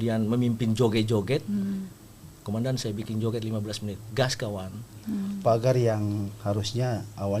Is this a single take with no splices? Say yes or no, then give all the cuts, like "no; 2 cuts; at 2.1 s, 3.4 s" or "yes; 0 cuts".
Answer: no; 1 cut; at 5.0 s